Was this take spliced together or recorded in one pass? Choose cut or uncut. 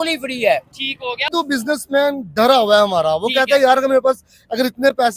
cut